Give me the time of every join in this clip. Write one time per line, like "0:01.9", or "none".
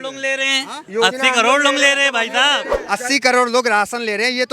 0:02.7